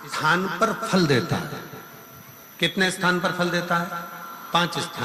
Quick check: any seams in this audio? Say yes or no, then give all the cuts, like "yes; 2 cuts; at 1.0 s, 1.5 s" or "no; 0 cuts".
no; 0 cuts